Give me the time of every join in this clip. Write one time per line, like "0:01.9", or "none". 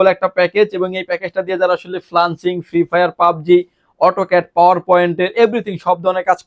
none